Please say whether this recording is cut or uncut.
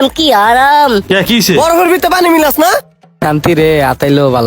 cut